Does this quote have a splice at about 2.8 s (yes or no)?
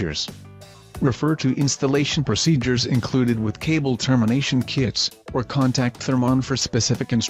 no